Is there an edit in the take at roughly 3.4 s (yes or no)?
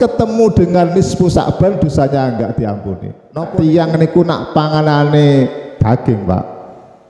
yes